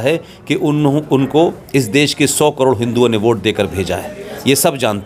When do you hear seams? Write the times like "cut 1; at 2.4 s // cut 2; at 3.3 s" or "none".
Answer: none